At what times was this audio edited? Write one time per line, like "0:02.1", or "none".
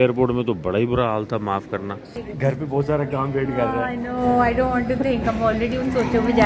0:02.1